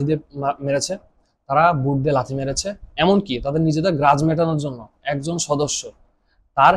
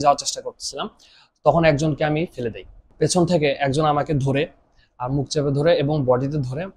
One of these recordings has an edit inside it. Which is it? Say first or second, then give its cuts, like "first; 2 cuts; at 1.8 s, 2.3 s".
second; 1 cut; at 2.9 s